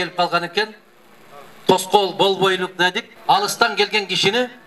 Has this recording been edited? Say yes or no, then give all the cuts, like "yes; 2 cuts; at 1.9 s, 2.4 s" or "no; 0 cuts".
yes; 1 cut; at 3.1 s